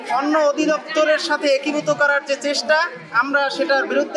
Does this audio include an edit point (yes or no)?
no